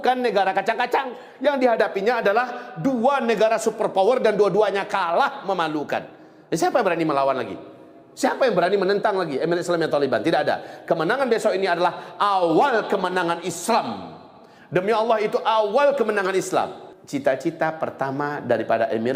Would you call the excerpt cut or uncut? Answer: uncut